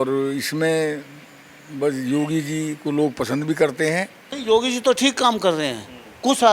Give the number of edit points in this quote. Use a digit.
1